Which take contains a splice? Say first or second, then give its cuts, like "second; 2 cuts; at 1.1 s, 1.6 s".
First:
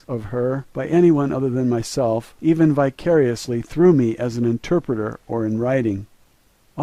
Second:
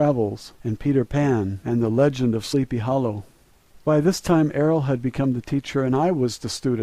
second; 1 cut; at 2.4 s